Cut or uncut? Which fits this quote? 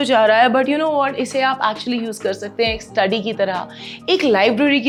uncut